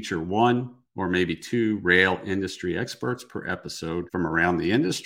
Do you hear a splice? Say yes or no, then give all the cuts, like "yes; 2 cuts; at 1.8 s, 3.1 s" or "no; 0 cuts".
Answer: yes; 1 cut; at 4.1 s